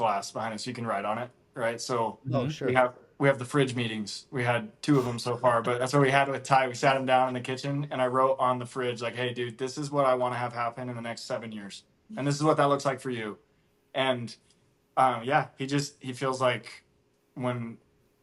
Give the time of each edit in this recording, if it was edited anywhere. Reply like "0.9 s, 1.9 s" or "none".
none